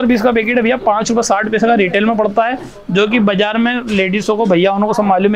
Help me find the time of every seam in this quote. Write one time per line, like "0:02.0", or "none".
none